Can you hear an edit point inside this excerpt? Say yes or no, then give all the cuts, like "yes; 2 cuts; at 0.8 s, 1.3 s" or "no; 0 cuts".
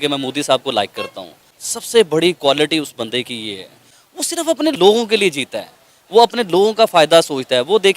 yes; 1 cut; at 4.7 s